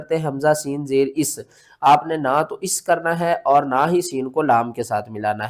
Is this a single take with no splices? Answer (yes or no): yes